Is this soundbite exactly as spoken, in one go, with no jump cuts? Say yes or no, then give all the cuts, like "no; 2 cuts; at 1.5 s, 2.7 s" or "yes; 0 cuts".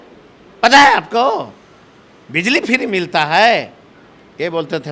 yes; 0 cuts